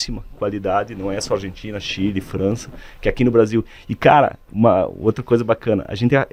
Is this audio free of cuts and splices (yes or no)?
yes